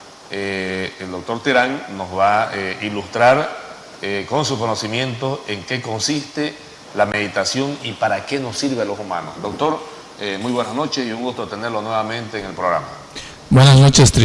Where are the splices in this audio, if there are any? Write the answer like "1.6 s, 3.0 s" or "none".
none